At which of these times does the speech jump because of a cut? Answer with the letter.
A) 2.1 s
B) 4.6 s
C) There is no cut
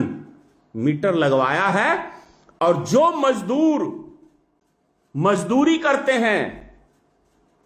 C